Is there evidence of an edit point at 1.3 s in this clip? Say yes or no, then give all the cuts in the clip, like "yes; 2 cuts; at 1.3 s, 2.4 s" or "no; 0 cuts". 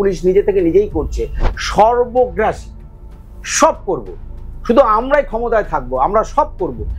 yes; 1 cut; at 1.3 s